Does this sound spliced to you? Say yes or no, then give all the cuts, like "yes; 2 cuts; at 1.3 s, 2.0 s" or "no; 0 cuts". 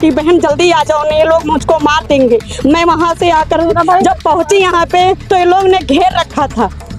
no; 0 cuts